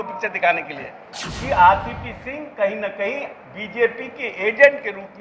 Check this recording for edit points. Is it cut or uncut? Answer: cut